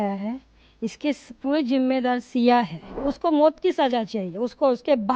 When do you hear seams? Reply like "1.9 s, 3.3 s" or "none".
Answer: 3.0 s